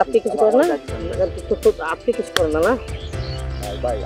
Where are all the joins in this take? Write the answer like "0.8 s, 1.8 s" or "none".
none